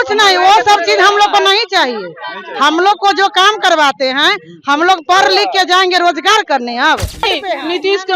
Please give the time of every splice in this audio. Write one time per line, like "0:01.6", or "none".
0:07.3

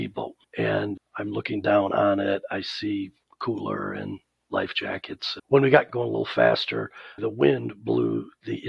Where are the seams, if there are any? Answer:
0:01.0
0:05.3
0:05.9
0:07.2

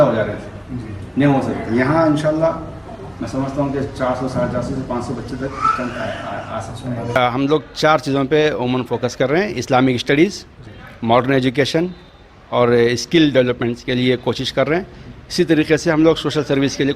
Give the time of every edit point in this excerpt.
0:07.2

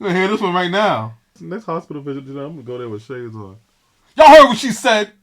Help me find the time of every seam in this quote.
0:01.4

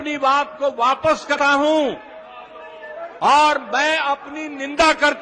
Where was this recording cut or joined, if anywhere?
0:01.3

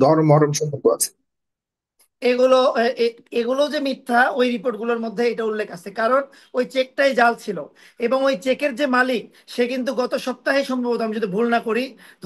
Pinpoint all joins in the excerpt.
none

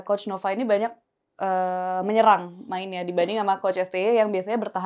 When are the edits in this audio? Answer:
none

